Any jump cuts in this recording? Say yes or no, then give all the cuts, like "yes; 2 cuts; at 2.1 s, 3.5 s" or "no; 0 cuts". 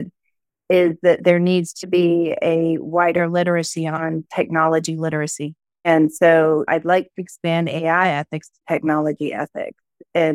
yes; 1 cut; at 5.8 s